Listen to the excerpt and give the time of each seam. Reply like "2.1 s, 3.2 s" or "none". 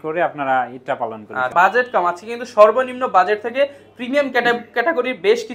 1.5 s